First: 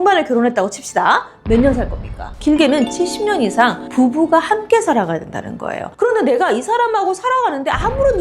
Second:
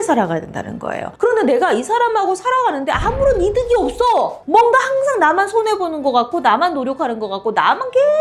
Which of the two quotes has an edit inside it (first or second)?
first